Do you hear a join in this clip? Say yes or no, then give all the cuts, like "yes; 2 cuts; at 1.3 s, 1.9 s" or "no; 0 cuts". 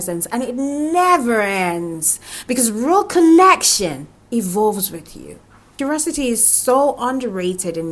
yes; 1 cut; at 5.6 s